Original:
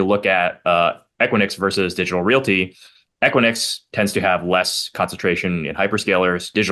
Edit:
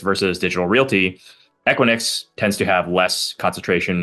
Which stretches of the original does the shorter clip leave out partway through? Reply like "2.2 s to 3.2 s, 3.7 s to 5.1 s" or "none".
none